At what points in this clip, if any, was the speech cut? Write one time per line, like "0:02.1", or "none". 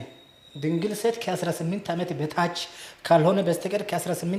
none